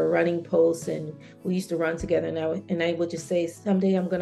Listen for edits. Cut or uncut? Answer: uncut